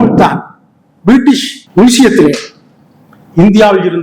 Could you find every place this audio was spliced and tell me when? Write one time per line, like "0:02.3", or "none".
0:01.6

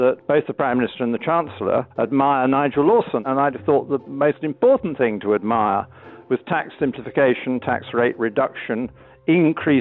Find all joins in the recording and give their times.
0:01.9
0:03.2

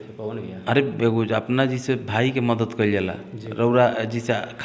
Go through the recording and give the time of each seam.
none

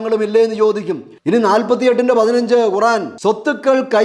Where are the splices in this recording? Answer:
0:01.1

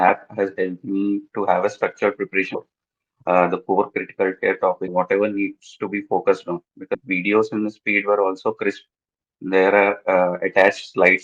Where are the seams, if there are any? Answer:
0:02.5
0:04.9
0:07.0

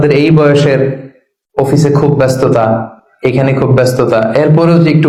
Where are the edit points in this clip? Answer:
none

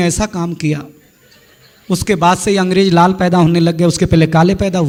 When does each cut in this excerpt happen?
none

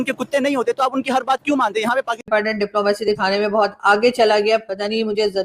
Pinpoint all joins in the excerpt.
0:02.2

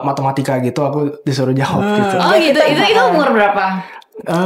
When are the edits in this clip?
none

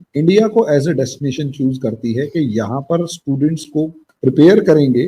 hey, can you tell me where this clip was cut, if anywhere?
0:04.0

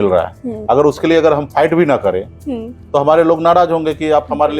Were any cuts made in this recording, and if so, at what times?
none

